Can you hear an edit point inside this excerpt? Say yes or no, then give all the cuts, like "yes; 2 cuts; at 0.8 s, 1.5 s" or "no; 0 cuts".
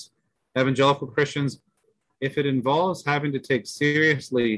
yes; 1 cut; at 1.5 s